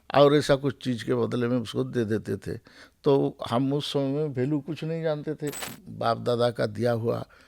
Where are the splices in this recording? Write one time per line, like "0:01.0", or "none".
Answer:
0:05.7